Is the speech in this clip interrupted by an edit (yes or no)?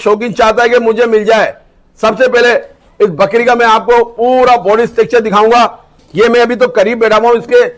no